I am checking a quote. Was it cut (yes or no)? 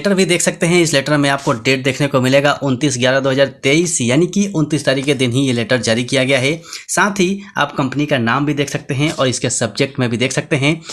no